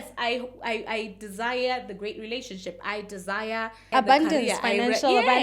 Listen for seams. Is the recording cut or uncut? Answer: cut